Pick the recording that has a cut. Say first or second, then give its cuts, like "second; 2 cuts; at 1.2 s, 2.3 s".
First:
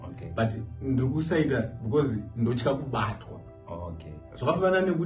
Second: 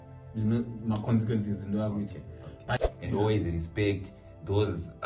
second; 1 cut; at 2.8 s